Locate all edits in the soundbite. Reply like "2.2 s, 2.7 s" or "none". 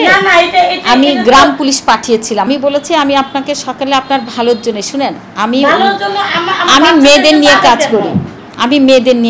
2.5 s